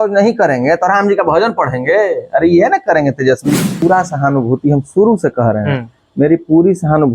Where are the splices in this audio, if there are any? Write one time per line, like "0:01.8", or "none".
0:03.7